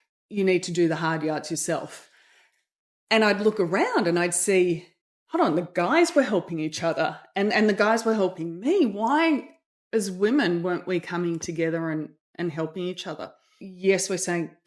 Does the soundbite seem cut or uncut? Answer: cut